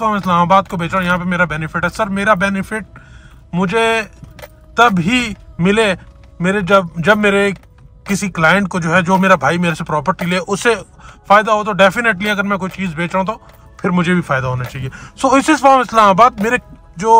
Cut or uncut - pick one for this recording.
uncut